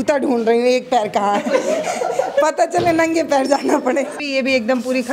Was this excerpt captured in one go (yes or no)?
no